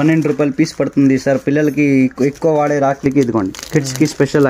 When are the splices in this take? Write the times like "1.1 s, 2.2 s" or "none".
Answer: 3.0 s